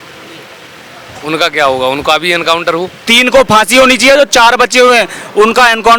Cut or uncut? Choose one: cut